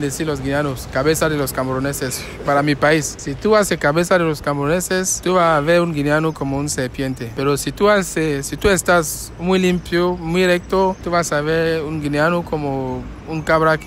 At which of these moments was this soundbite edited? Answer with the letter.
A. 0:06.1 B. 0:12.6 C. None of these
C